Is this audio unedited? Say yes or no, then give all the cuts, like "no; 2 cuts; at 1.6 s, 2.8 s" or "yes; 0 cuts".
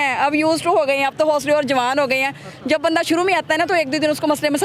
yes; 0 cuts